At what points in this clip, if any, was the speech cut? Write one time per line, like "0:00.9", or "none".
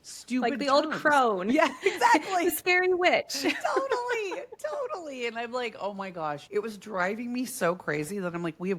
0:06.4

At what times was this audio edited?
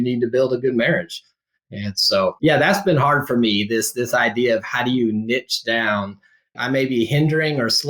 0:02.4
0:06.6

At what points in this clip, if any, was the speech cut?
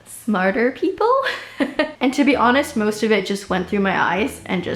0:01.9

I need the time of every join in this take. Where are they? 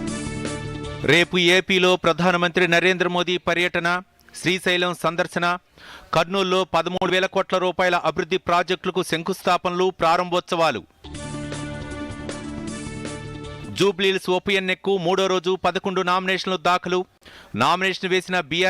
0:00.9

